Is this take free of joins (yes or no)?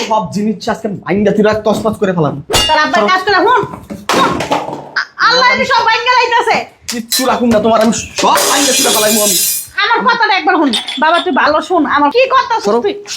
no